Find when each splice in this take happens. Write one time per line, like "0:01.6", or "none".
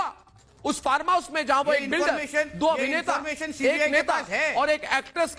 none

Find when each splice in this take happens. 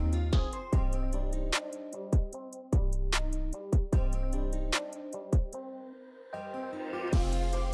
none

